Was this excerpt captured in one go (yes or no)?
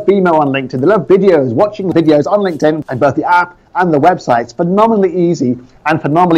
no